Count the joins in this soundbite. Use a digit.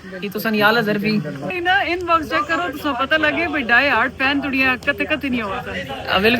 1